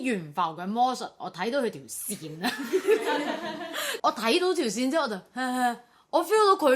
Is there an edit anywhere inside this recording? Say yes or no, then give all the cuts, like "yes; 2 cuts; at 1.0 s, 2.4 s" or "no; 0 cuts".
yes; 1 cut; at 3.9 s